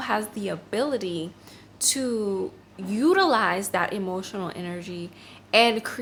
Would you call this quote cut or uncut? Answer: uncut